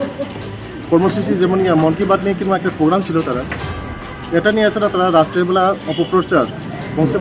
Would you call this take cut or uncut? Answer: uncut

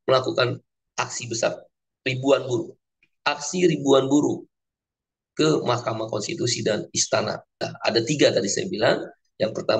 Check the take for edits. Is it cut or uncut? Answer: cut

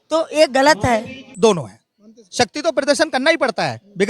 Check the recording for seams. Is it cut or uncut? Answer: cut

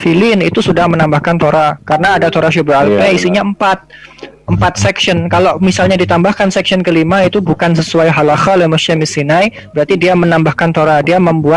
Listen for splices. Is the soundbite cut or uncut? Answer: uncut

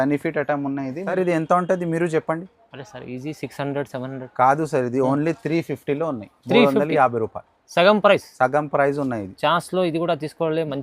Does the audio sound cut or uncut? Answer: cut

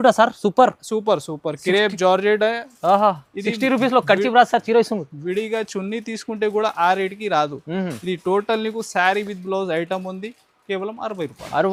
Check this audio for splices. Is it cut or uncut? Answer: uncut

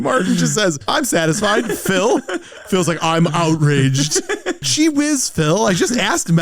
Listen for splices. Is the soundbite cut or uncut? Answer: cut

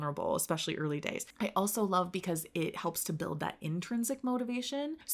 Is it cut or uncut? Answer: cut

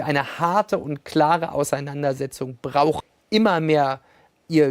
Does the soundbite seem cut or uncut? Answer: cut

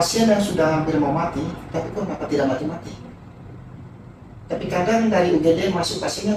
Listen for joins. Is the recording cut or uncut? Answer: uncut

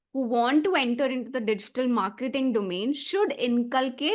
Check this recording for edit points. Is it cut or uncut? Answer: uncut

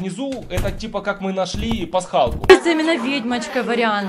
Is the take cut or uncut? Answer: cut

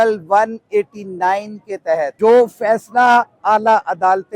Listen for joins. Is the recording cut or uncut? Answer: cut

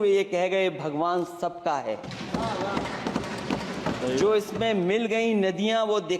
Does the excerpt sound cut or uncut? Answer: uncut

